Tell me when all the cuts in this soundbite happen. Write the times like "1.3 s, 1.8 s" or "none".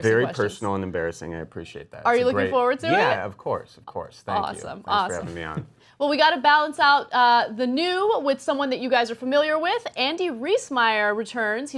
none